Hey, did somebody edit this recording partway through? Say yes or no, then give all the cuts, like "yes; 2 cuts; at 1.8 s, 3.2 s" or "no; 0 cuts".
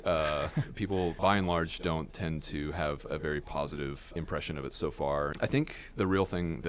yes; 3 cuts; at 1.2 s, 4.1 s, 5.3 s